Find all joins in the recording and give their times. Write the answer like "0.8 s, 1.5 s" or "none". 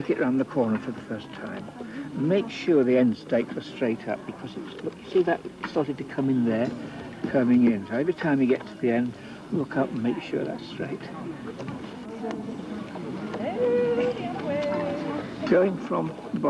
4.0 s